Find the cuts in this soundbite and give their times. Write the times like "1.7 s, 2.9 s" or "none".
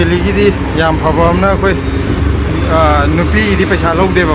none

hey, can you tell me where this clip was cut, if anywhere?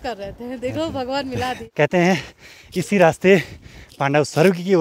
1.6 s

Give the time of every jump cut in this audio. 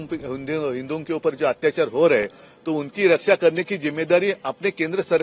none

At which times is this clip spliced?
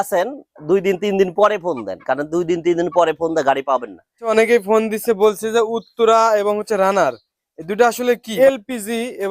4.3 s, 8.3 s

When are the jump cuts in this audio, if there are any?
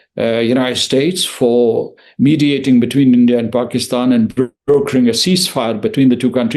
none

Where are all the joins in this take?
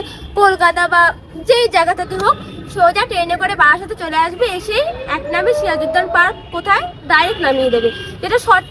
none

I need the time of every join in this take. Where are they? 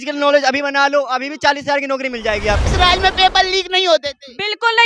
2.6 s

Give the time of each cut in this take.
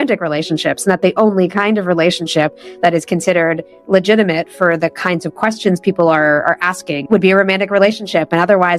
none

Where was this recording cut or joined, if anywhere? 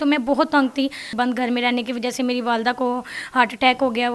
1.1 s

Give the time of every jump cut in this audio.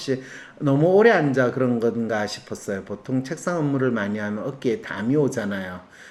none

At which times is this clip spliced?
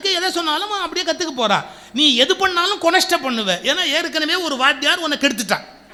none

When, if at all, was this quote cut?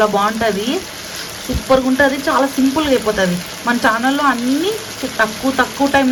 none

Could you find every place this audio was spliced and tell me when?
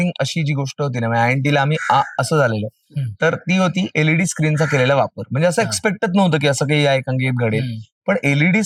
none

